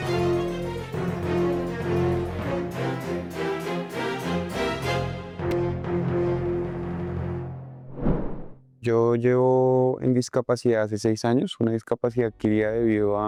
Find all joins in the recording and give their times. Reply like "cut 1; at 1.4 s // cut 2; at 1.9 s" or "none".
none